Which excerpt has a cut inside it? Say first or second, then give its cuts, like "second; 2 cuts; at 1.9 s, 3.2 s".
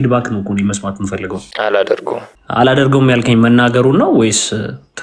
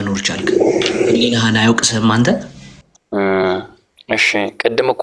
first; 2 cuts; at 1.4 s, 2.3 s